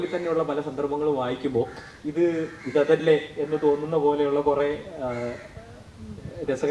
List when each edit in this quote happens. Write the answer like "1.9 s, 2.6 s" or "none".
none